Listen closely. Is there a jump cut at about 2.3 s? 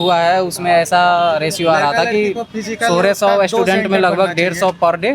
no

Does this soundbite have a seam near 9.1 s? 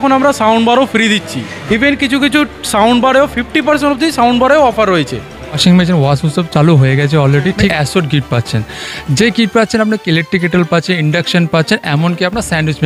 no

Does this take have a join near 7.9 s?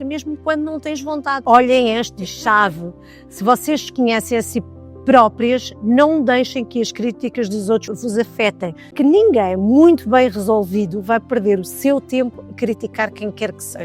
yes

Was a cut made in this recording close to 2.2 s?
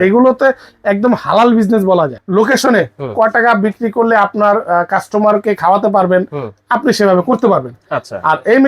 yes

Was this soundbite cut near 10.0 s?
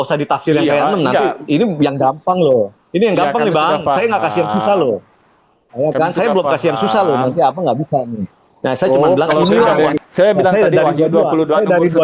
yes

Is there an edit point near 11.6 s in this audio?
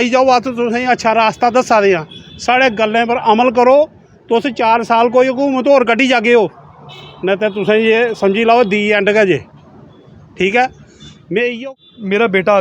yes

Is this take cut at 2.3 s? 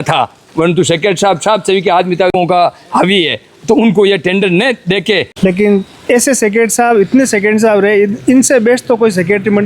yes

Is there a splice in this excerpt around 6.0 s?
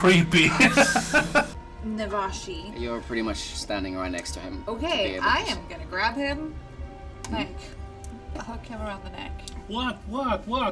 no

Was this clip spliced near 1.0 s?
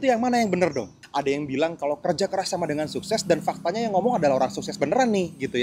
yes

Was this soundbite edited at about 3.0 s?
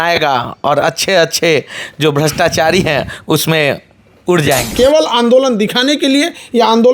no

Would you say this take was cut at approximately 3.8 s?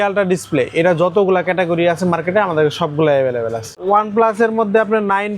yes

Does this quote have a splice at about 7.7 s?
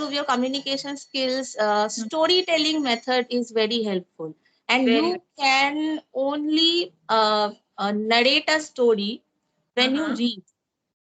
no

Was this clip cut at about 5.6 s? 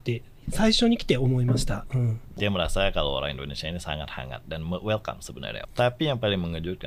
yes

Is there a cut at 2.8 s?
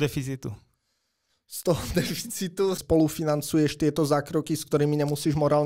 yes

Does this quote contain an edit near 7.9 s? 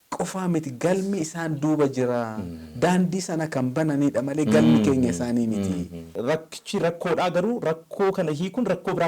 no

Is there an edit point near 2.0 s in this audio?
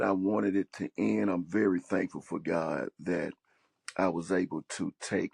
no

